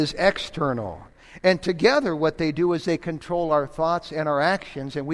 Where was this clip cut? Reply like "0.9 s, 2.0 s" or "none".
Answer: none